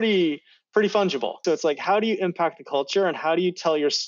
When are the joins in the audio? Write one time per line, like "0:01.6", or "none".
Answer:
0:01.4